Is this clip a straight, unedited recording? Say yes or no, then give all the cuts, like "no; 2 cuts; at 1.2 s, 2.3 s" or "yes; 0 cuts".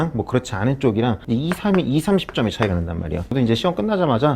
no; 2 cuts; at 1.2 s, 3.3 s